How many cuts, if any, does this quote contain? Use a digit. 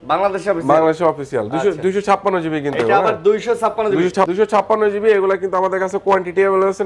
1